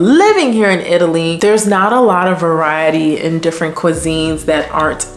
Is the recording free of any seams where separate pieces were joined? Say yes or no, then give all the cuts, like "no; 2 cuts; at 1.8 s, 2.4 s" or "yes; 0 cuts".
no; 1 cut; at 1.3 s